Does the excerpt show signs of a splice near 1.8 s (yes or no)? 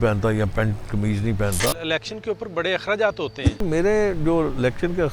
yes